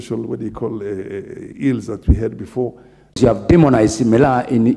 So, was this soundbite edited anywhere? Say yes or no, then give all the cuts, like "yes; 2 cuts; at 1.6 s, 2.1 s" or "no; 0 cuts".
yes; 1 cut; at 3.2 s